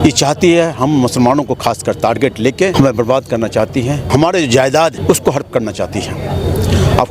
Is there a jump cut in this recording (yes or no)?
no